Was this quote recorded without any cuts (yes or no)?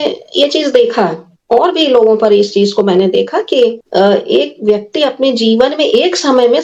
yes